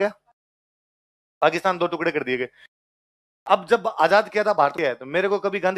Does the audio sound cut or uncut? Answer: cut